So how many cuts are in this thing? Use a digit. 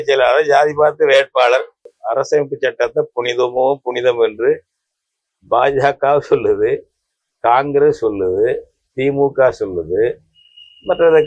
1